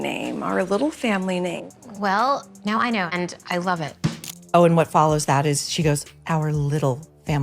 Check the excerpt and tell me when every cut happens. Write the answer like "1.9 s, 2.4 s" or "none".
4.3 s